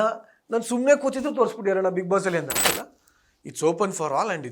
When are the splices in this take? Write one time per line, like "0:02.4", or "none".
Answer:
0:02.7